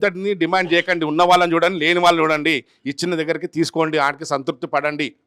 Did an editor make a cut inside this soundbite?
no; 0 cuts

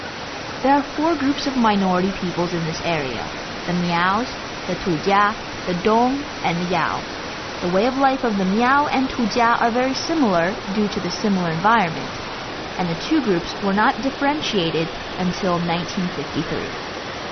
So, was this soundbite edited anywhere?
no; 0 cuts

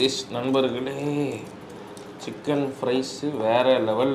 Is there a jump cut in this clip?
no; 0 cuts

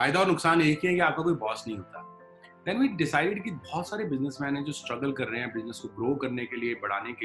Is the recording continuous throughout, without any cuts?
yes; 0 cuts

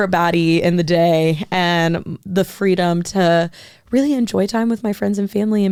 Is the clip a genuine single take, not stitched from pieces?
yes; 0 cuts

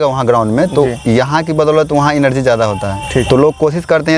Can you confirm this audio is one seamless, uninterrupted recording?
yes; 0 cuts

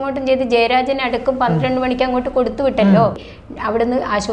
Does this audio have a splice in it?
yes; 1 cut; at 3.2 s

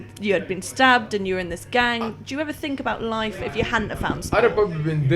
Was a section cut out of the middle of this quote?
no; 0 cuts

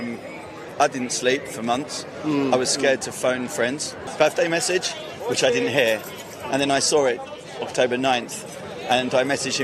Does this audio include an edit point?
yes; 1 cut; at 4.0 s

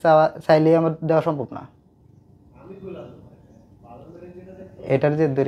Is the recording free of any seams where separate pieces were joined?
yes; 0 cuts

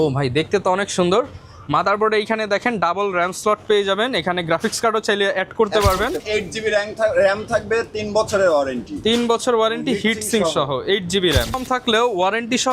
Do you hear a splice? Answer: yes; 2 cuts; at 6.2 s, 11.6 s

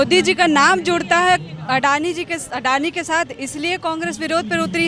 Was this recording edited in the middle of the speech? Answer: no; 0 cuts

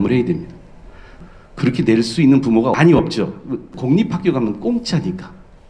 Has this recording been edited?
yes; 3 cuts; at 1.1 s, 2.8 s, 3.7 s

